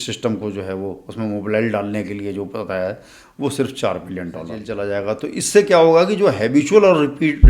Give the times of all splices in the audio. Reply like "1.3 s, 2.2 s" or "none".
4.6 s